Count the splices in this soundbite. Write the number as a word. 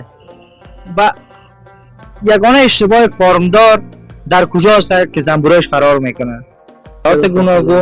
one